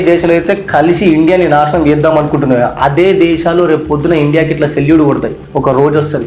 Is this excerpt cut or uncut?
uncut